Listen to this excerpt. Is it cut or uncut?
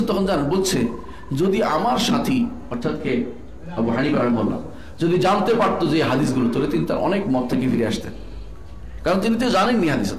uncut